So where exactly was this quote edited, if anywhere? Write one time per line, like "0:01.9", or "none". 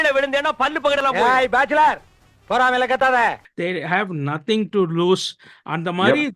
0:03.5